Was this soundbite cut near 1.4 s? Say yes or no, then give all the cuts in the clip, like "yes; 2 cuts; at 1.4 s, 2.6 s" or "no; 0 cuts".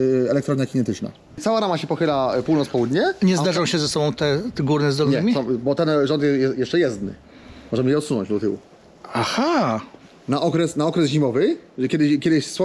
yes; 1 cut; at 1.4 s